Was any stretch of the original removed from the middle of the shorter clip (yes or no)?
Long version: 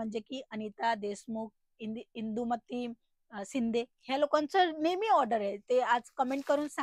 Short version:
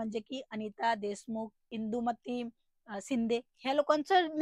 yes